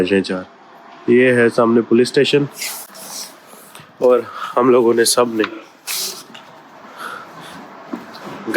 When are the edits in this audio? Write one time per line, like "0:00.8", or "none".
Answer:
none